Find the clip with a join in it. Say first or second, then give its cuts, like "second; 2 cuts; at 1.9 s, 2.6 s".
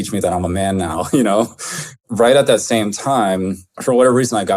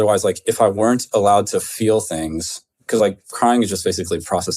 first; 2 cuts; at 1.9 s, 3.7 s